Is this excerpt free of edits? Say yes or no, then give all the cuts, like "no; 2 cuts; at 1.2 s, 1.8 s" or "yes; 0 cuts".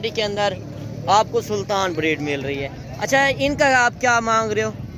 yes; 0 cuts